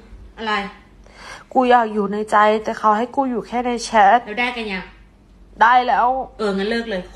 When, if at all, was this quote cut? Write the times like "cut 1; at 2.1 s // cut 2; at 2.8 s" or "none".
none